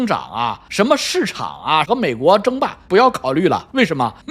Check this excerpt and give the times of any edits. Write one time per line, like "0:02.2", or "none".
0:01.9